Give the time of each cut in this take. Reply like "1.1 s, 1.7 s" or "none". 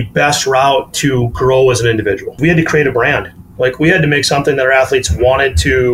2.4 s

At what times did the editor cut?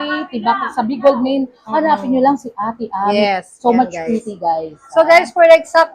none

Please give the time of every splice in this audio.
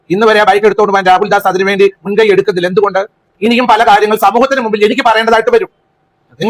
3.3 s

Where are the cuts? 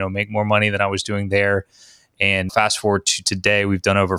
2.5 s

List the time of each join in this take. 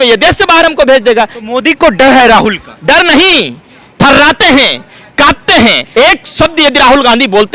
1.4 s, 5.8 s

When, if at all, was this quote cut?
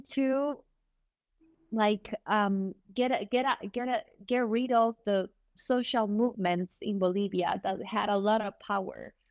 none

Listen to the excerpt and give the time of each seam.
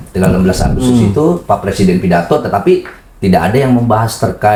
none

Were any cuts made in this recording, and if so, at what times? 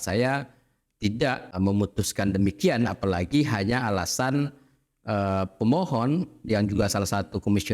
1.5 s

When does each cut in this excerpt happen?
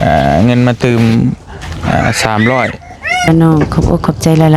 3.3 s

